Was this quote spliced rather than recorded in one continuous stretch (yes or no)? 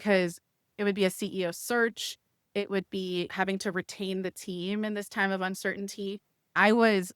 yes